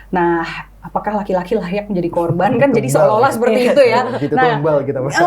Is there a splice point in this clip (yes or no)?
no